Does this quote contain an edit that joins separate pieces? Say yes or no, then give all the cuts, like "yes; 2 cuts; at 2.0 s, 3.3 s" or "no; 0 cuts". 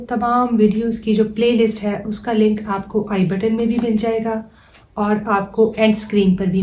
no; 0 cuts